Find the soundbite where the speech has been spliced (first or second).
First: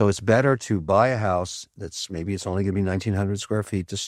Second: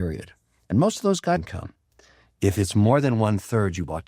second